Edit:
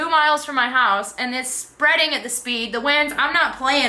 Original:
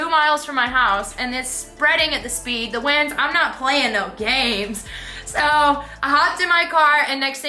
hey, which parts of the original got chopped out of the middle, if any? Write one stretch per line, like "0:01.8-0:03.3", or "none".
none